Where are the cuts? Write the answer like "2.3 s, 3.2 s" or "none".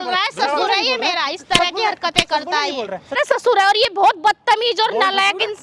3.2 s